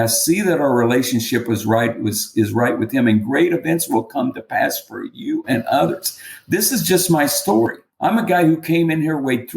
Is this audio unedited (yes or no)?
no